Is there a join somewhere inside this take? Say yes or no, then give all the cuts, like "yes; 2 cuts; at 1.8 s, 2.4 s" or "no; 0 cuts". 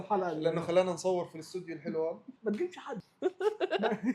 no; 0 cuts